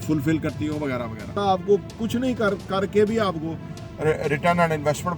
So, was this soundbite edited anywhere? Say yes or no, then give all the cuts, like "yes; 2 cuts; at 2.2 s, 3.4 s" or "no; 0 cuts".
yes; 1 cut; at 1.3 s